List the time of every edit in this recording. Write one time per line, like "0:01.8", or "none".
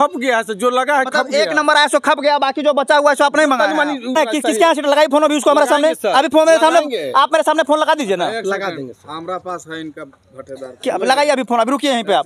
0:04.2